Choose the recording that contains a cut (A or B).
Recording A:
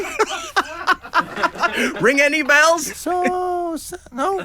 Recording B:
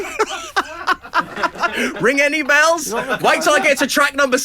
A